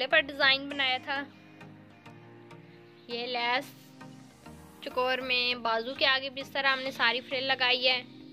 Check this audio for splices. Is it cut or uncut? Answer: uncut